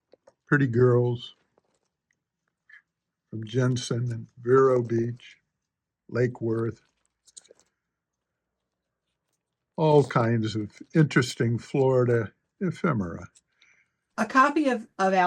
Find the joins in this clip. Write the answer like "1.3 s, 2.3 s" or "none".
14.0 s